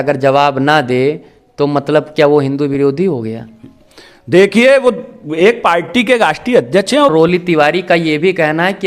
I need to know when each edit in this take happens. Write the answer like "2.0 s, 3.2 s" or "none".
7.1 s